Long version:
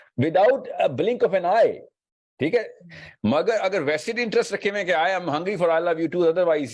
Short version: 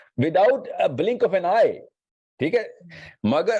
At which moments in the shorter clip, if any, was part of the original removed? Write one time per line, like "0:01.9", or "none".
none